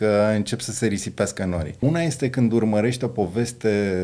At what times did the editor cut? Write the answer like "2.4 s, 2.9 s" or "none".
1.8 s